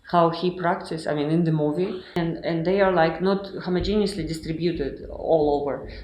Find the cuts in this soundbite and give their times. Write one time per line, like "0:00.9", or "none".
0:02.2